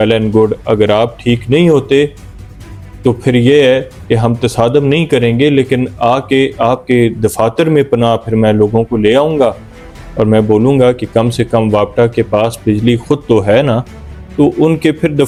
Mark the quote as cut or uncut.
uncut